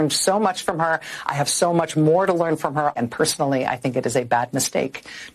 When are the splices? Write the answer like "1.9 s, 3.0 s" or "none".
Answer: 3.0 s